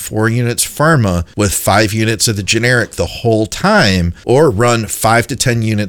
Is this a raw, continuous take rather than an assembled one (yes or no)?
no